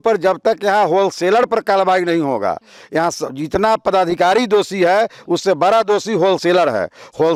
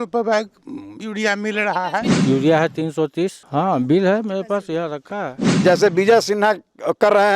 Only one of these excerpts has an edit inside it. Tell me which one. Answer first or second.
second